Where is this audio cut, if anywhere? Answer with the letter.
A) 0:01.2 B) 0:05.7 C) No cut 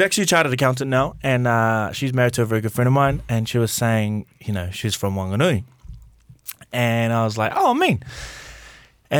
C